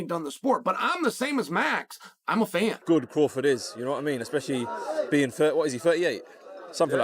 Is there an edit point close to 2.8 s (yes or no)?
yes